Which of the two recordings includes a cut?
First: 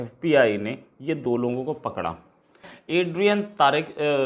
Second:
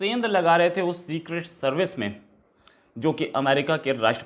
first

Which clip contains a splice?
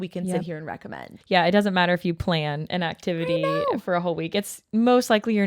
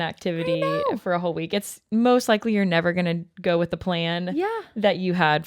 first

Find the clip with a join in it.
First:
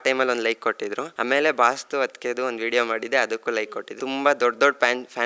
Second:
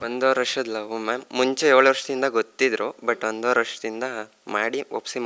first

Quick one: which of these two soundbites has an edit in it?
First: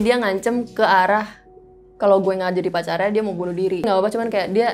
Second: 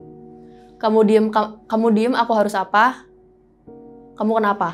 first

